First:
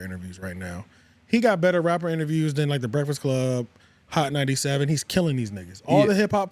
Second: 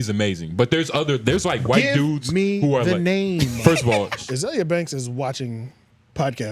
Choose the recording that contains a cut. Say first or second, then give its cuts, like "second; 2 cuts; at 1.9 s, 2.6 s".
second; 1 cut; at 4.2 s